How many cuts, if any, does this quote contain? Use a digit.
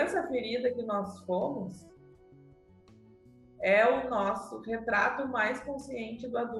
0